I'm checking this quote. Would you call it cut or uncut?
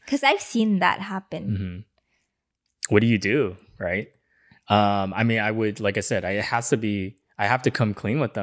uncut